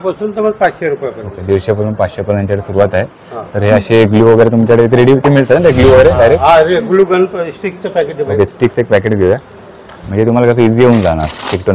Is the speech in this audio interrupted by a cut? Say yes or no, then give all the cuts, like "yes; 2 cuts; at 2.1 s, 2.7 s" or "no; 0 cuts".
no; 0 cuts